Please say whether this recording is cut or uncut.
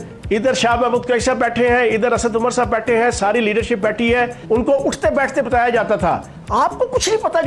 cut